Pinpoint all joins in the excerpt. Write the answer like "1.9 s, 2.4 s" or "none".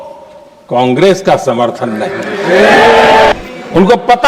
3.3 s